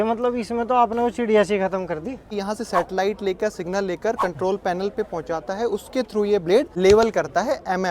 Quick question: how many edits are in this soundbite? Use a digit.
2